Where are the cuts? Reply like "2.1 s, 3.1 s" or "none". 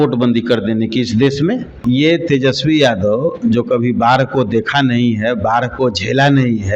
1.8 s